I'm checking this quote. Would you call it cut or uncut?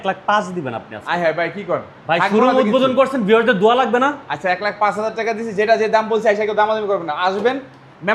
uncut